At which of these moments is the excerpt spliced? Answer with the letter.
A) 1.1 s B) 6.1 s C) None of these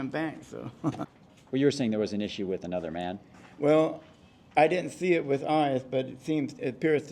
A